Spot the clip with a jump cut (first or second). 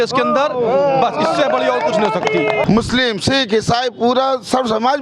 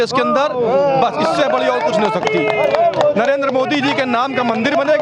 first